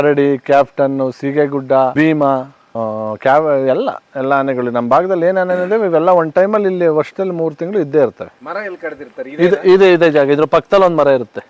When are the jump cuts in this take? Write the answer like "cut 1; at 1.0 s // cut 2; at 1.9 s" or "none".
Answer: cut 1; at 8.3 s